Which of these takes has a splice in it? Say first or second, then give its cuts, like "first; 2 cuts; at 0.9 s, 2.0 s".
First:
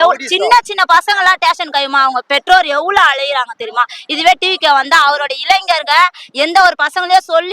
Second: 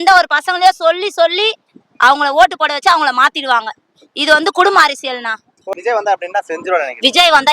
second; 1 cut; at 5.7 s